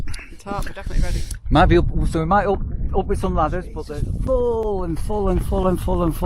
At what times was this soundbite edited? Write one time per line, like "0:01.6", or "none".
0:03.8